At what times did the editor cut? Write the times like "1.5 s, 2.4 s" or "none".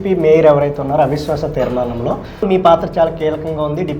2.4 s